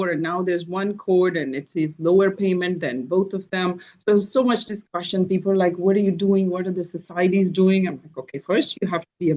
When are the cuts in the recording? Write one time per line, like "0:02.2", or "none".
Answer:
none